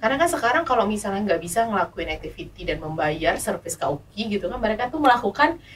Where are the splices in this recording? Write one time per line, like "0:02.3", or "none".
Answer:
none